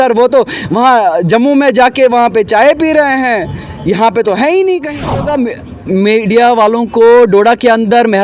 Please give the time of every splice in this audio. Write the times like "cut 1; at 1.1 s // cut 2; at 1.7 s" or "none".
cut 1; at 5.3 s